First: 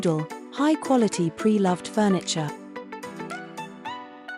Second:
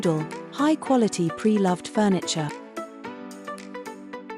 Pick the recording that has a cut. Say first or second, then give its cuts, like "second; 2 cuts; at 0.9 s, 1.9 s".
second; 1 cut; at 2.8 s